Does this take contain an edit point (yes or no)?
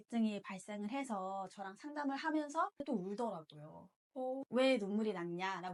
no